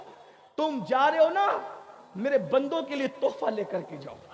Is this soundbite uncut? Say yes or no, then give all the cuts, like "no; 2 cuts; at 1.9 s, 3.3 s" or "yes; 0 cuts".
yes; 0 cuts